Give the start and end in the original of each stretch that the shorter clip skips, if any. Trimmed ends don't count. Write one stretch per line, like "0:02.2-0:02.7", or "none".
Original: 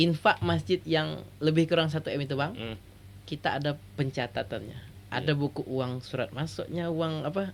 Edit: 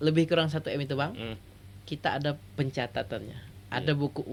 none